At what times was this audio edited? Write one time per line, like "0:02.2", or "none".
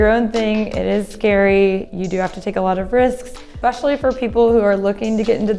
0:03.6